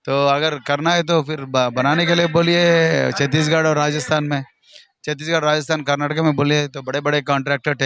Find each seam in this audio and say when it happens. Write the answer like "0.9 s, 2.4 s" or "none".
none